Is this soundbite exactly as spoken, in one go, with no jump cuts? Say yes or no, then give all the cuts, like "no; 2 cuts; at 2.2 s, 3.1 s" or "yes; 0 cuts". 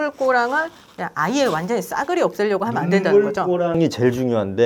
yes; 0 cuts